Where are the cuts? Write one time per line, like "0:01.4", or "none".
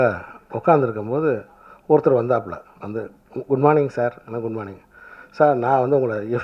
none

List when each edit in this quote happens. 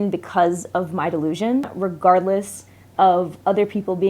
0:01.7

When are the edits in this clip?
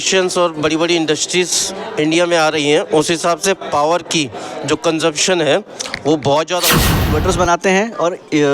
0:07.0

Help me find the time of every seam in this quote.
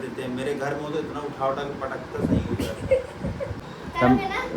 0:03.6

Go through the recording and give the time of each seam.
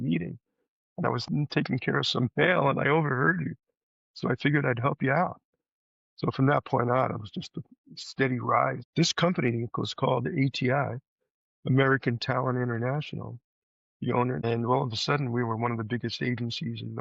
0:08.8
0:14.4

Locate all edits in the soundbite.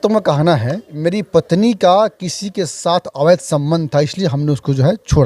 0:00.9

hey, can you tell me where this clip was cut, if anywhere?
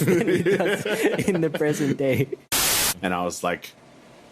0:02.5

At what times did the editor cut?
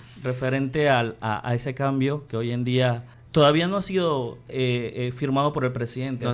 0:03.1

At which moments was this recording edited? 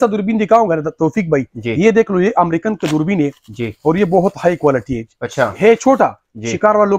none

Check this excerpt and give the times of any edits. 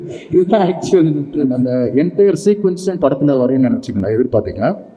none

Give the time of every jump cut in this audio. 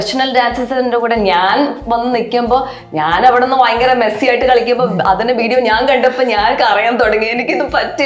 none

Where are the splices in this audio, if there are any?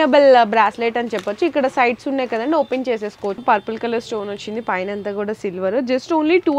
0:03.4

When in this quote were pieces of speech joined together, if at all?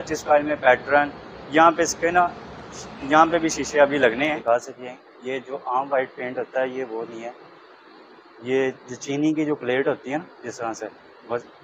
0:04.4

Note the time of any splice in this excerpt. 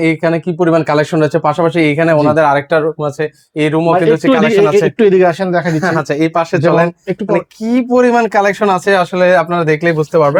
none

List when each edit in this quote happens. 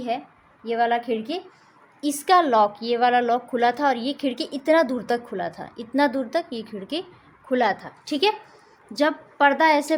none

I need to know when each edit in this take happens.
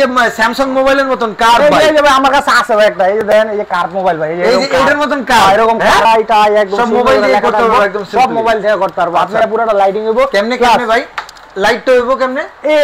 0:06.0
0:09.4

